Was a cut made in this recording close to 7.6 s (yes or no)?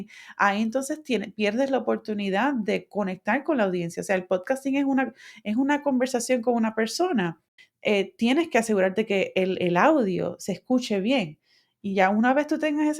yes